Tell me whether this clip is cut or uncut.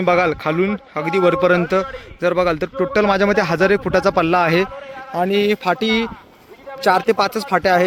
uncut